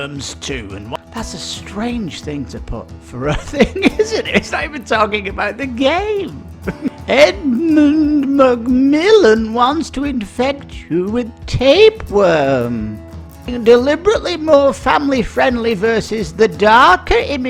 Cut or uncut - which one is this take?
cut